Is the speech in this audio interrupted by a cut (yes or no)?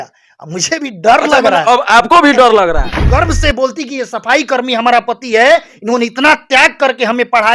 yes